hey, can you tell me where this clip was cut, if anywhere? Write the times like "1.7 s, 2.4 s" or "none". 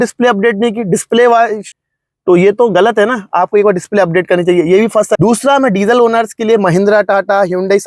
1.7 s, 5.2 s